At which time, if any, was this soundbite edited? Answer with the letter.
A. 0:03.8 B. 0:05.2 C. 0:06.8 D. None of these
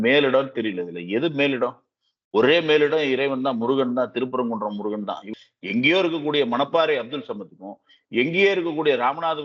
B